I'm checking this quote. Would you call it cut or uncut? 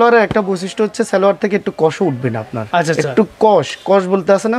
uncut